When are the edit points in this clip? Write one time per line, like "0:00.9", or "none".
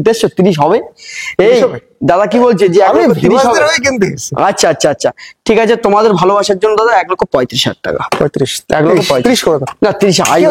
none